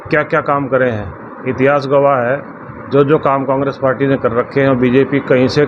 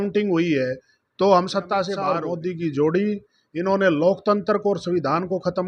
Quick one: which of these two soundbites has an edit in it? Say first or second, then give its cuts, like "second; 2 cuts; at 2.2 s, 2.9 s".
second; 1 cut; at 2.2 s